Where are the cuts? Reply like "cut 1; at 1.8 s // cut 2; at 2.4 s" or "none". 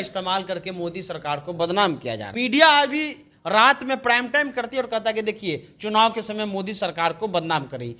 cut 1; at 2.2 s